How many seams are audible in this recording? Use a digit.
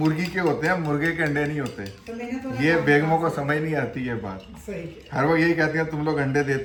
0